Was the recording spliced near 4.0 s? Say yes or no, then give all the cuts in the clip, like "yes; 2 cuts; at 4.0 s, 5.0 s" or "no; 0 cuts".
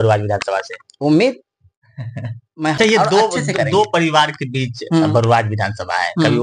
no; 1 cut; at 2.8 s